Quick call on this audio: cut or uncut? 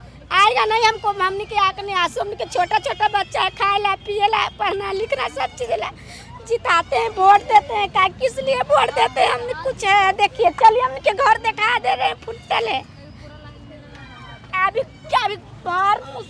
uncut